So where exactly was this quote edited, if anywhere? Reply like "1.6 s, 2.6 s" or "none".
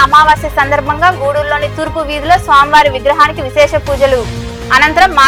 none